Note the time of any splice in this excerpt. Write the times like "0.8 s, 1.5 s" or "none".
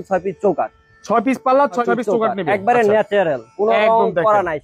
none